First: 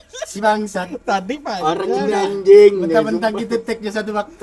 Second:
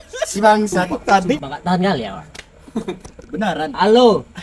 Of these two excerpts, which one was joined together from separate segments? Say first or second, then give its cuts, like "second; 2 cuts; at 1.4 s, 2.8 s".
second; 2 cuts; at 1.4 s, 3.0 s